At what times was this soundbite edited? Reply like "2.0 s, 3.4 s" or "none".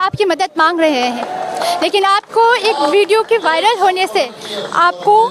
none